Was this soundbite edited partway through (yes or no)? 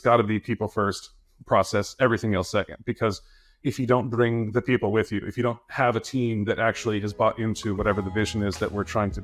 no